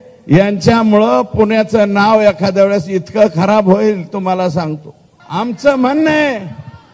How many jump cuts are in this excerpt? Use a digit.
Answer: 1